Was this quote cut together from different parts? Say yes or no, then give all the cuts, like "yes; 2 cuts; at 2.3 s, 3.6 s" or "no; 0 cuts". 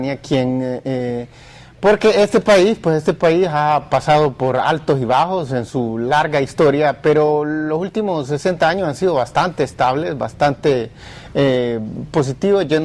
yes; 1 cut; at 6.0 s